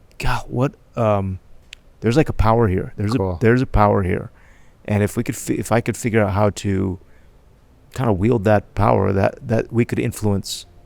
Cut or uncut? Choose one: uncut